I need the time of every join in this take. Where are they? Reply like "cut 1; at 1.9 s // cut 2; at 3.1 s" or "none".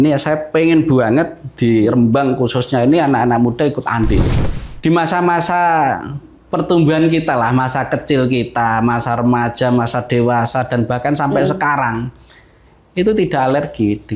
cut 1; at 4.3 s